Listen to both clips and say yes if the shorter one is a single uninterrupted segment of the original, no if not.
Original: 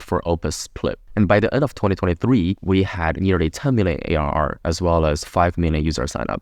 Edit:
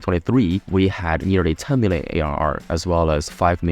yes